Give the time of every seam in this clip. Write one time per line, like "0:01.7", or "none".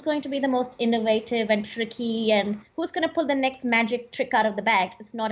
none